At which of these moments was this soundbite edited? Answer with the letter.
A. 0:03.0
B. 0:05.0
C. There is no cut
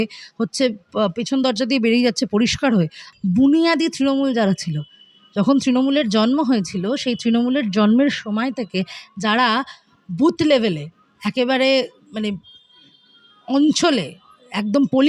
A